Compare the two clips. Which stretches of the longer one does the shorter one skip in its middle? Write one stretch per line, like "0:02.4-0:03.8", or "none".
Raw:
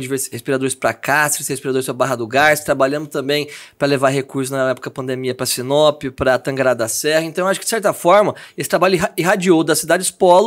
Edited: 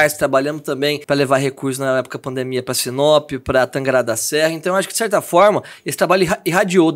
0:03.5-0:03.7